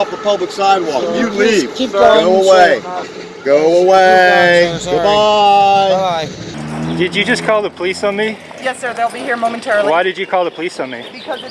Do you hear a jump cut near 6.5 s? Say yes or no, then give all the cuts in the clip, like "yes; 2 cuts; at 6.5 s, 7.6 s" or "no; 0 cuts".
yes; 1 cut; at 6.5 s